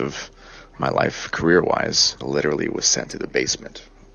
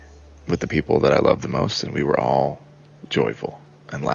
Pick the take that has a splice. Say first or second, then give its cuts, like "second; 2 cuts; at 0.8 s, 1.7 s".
first; 1 cut; at 2.1 s